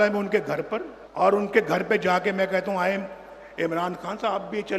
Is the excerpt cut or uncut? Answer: cut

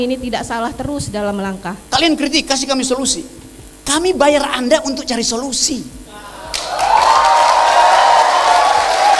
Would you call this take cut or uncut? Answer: cut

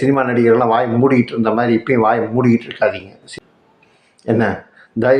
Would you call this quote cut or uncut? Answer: cut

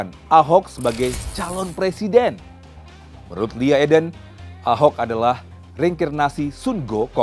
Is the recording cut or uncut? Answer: uncut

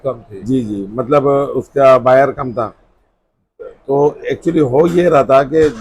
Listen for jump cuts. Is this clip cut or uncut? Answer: uncut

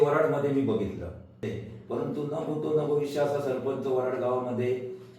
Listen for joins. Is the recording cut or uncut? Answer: cut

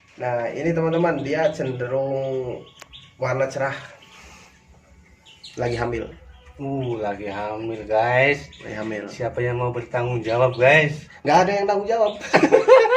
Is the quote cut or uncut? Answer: uncut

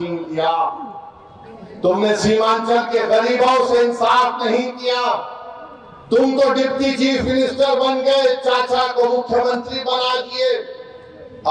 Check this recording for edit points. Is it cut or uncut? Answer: uncut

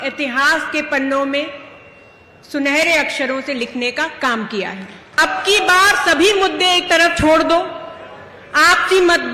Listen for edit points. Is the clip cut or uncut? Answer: cut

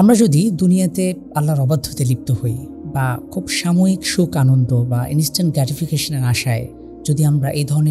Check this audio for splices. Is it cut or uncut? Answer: uncut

